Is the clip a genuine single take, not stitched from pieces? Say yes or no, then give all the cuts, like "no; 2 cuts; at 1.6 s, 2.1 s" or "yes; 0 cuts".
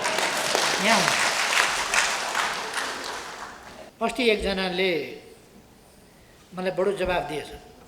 no; 1 cut; at 3.8 s